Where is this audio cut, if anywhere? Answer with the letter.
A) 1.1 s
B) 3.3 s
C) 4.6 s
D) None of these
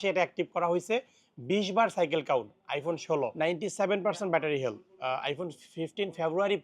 B